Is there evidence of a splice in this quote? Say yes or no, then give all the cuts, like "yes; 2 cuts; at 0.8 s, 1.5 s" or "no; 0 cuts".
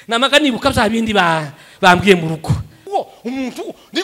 yes; 1 cut; at 2.9 s